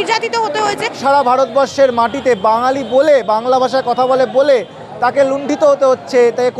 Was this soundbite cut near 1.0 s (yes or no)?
yes